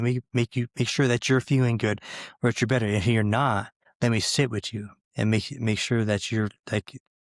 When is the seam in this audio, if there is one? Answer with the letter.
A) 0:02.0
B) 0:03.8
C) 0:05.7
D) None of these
B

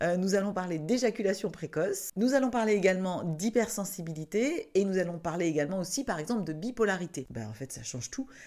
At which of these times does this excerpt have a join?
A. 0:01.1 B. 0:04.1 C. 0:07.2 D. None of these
C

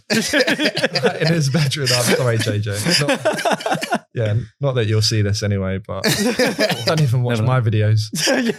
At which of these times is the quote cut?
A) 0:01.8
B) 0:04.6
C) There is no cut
C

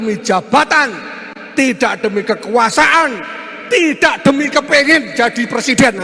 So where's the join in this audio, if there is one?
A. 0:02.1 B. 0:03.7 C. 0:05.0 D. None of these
D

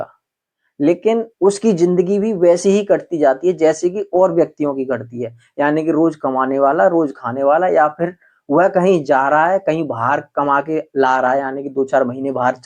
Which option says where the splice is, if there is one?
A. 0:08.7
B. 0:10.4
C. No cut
C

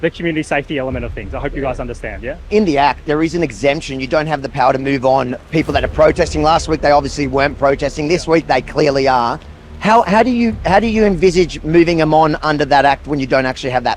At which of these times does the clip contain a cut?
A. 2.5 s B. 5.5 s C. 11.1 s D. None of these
A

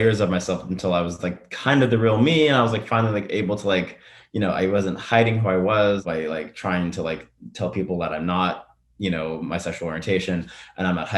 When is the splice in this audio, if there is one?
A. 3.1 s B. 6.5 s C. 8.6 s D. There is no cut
D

